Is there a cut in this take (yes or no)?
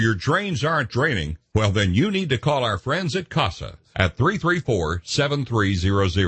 no